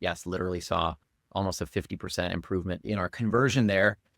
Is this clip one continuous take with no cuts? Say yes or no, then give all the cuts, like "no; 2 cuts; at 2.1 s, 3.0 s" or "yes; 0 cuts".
no; 1 cut; at 2.8 s